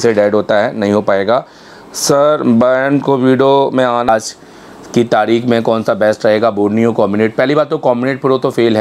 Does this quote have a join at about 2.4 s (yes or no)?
no